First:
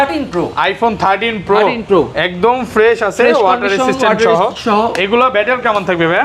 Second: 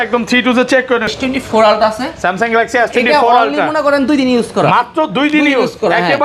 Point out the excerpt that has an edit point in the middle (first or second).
second